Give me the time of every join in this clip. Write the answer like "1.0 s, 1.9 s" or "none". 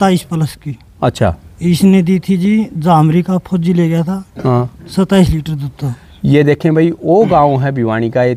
none